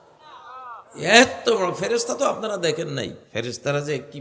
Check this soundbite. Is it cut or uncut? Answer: cut